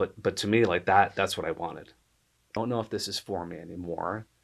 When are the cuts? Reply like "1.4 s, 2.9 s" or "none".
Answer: 2.6 s